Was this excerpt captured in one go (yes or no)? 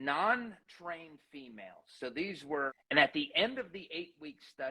no